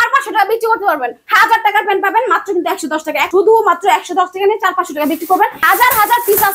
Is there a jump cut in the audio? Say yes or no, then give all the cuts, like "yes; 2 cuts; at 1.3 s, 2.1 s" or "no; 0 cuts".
yes; 3 cuts; at 1.2 s, 3.3 s, 5.6 s